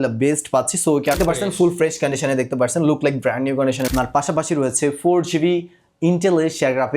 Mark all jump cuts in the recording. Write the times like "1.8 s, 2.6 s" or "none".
1.2 s, 3.8 s

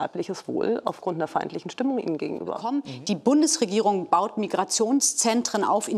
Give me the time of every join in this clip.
2.7 s

